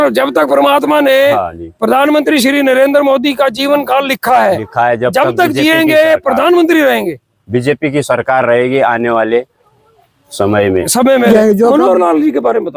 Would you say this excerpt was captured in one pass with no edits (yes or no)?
no